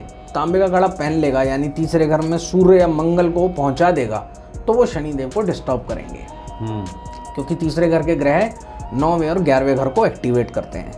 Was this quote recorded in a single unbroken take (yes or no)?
yes